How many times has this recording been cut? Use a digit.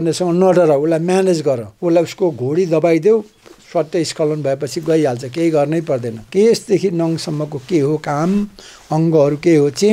2